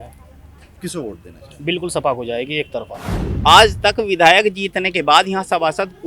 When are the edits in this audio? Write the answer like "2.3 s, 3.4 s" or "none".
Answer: 3.2 s